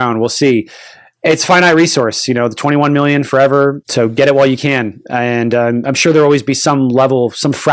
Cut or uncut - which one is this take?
uncut